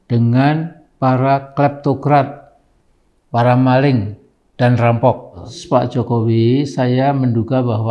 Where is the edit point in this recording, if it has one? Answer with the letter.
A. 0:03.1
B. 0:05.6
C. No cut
B